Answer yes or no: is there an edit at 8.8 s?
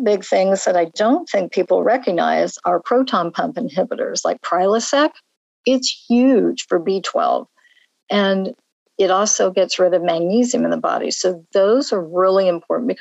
no